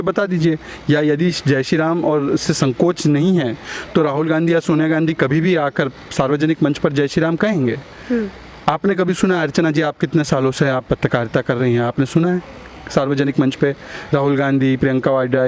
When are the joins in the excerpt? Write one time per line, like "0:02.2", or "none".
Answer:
none